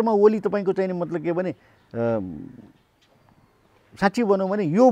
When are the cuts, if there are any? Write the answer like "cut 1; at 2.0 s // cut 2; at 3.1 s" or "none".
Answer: none

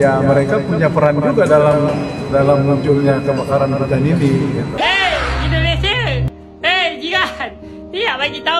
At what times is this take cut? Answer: cut 1; at 4.7 s

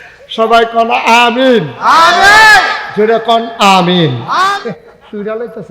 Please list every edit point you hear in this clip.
cut 1; at 4.6 s

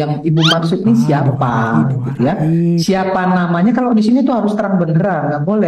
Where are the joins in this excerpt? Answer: none

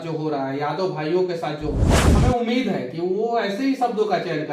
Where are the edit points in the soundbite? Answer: cut 1; at 1.9 s

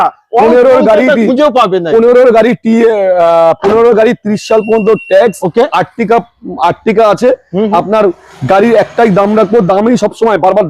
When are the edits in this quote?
none

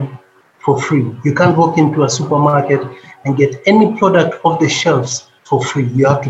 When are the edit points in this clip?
none

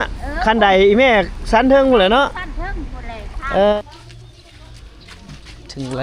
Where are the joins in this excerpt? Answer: cut 1; at 3.8 s

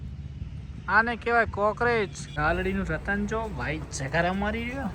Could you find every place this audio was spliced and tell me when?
cut 1; at 2.2 s

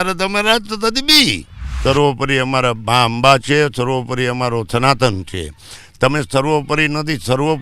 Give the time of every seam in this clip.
cut 1; at 1.6 s

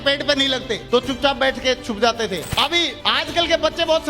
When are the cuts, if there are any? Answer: cut 1; at 2.4 s

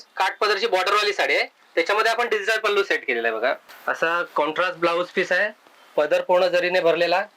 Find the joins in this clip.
cut 1; at 3.7 s

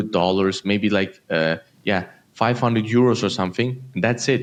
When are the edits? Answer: none

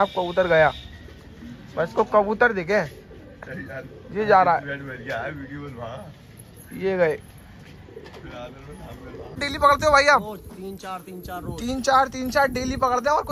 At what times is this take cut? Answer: cut 1; at 9.5 s

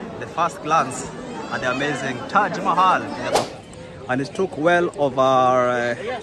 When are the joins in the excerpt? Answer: cut 1; at 3.4 s

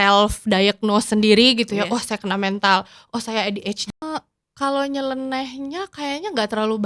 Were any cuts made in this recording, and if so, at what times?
cut 1; at 3.9 s

